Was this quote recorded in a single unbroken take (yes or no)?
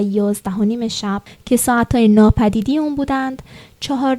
no